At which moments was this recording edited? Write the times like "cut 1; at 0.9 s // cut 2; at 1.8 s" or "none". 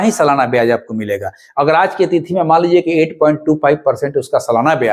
none